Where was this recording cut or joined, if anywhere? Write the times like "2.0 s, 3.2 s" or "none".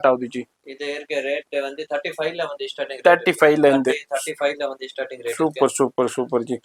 none